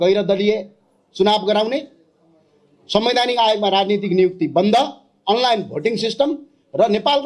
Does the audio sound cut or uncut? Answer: uncut